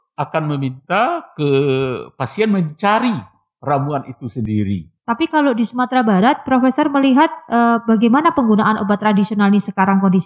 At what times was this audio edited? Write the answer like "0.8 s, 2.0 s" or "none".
4.5 s